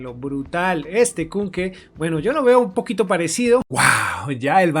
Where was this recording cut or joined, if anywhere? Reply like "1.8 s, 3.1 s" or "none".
3.7 s